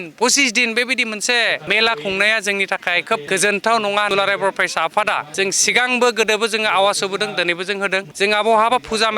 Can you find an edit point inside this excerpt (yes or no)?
yes